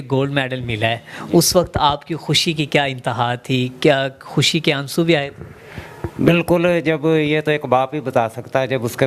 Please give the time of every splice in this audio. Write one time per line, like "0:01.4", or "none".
none